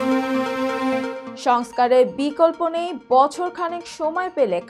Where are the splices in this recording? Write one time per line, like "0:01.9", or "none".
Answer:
0:01.2